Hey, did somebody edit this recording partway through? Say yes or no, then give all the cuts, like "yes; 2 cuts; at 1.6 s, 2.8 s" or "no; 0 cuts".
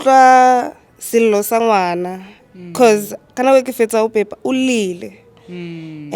no; 0 cuts